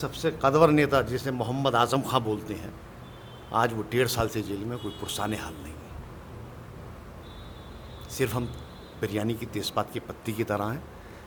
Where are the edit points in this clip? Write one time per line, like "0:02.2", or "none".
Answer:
none